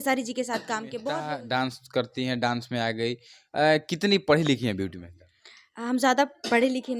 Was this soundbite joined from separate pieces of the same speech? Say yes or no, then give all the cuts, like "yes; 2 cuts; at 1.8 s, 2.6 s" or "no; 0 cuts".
yes; 1 cut; at 1.1 s